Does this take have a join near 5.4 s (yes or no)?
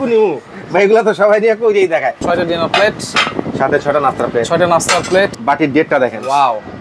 yes